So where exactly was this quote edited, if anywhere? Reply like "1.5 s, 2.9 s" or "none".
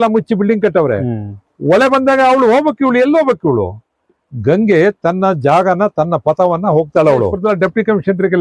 7.4 s